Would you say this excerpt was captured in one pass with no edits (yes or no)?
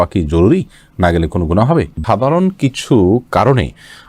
no